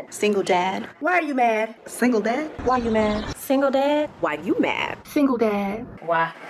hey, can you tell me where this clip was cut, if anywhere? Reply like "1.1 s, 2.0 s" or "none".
none